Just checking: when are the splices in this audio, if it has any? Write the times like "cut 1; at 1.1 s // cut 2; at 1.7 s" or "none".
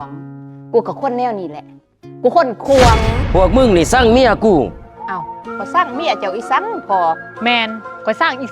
cut 1; at 3.2 s